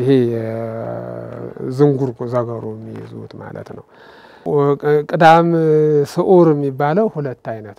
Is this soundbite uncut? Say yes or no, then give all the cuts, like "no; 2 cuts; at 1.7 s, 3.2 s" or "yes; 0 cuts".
no; 1 cut; at 4.2 s